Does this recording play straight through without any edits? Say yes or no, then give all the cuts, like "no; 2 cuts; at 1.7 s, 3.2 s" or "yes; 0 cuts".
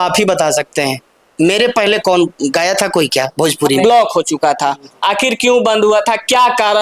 no; 1 cut; at 3.8 s